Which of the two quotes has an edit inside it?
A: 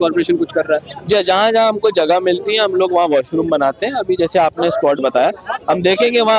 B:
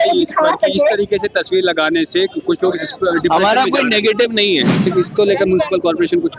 B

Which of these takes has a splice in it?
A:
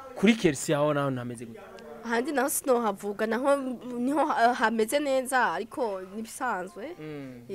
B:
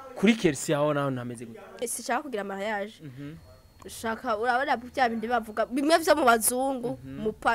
B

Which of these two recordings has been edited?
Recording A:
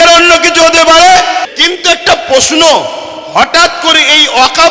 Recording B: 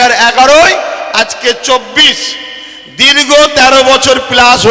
A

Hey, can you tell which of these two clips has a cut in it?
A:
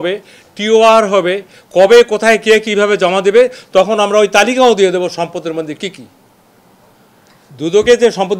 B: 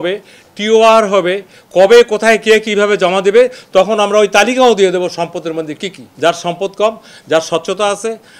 B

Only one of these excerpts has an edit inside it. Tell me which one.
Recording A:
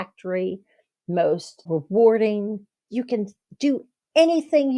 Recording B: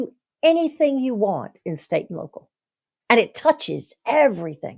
A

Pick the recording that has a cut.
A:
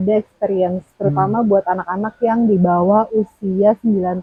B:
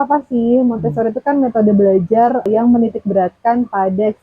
B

